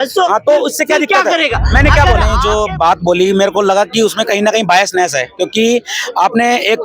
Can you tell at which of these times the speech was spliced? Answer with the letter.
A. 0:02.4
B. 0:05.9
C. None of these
A